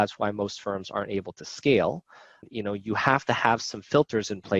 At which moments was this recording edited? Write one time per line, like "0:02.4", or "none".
0:02.4